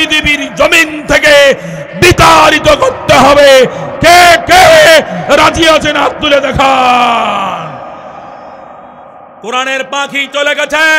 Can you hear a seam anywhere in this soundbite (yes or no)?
yes